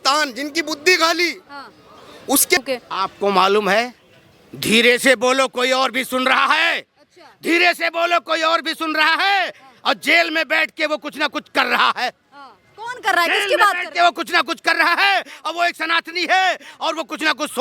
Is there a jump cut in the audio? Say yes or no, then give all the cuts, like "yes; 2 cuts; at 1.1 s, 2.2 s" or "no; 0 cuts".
yes; 1 cut; at 2.6 s